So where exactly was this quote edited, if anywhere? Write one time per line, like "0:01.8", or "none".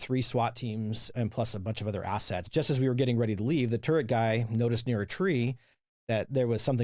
0:01.1
0:02.5